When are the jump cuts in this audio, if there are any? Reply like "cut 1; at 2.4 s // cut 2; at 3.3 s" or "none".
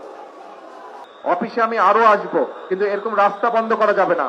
cut 1; at 1.1 s